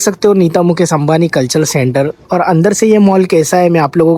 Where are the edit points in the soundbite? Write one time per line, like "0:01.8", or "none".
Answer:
none